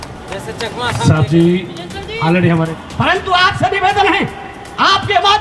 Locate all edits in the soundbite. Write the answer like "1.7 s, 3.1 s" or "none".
2.7 s